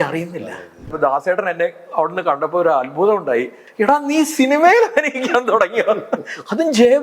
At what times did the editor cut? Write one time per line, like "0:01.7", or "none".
0:00.9
0:03.6